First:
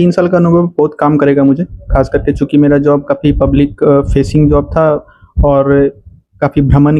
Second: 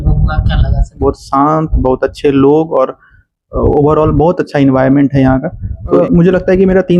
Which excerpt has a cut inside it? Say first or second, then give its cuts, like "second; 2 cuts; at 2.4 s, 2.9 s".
second; 2 cuts; at 1.0 s, 6.0 s